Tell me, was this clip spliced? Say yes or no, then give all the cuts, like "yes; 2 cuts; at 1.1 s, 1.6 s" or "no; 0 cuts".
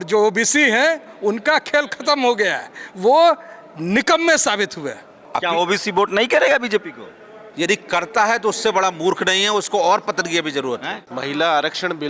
yes; 2 cuts; at 5.2 s, 11.0 s